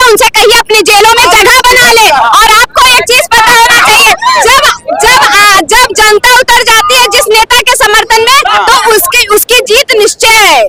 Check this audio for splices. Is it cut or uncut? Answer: uncut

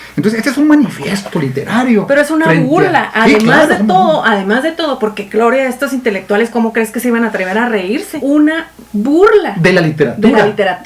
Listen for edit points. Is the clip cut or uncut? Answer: cut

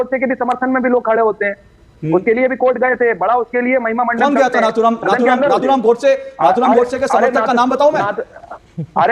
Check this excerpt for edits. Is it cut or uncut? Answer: uncut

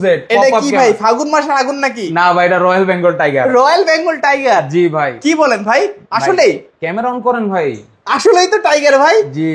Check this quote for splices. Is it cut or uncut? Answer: uncut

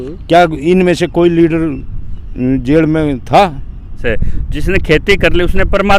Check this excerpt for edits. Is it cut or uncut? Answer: cut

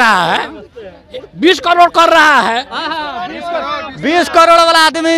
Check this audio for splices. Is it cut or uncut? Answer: uncut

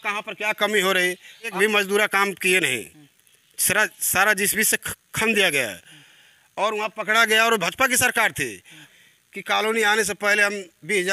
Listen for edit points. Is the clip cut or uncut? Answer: cut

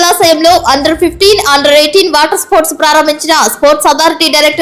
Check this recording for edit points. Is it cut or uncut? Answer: uncut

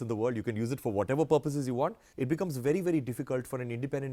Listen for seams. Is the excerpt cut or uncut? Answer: cut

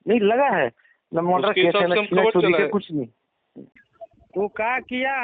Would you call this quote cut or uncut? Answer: uncut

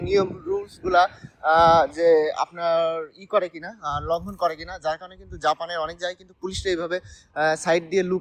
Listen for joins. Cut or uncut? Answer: uncut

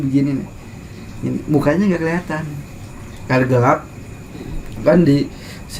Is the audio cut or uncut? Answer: uncut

